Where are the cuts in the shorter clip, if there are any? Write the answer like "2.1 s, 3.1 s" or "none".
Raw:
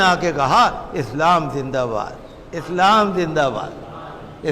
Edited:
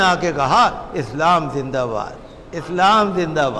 none